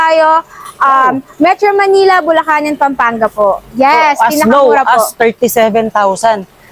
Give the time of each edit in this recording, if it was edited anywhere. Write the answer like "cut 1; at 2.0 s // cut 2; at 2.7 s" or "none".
cut 1; at 3.7 s